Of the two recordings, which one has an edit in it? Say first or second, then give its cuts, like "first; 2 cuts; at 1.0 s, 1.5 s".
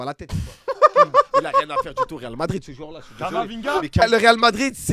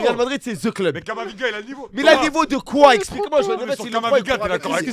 first; 1 cut; at 4.0 s